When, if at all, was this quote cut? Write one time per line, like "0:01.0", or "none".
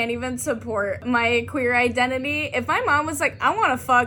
0:01.0